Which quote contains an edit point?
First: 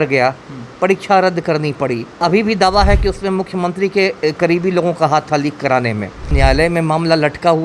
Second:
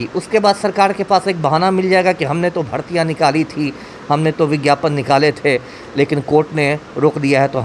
first; 2 cuts; at 2.2 s, 6.3 s

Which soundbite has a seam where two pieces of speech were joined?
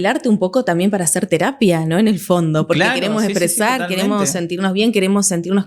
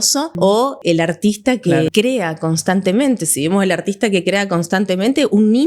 second; 2 cuts; at 0.8 s, 1.9 s

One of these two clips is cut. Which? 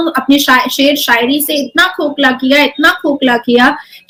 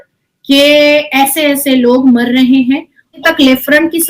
second; 1 cut; at 3.2 s

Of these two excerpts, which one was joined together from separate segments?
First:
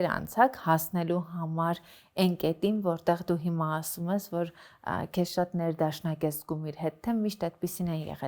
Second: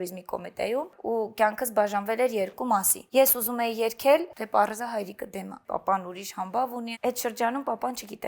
second; 5 cuts; at 1.0 s, 3.0 s, 4.4 s, 5.6 s, 6.9 s

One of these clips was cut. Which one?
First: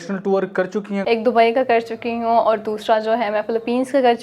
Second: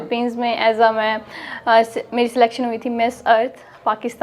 first; 1 cut; at 1.0 s

